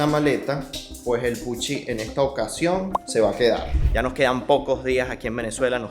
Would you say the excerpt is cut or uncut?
cut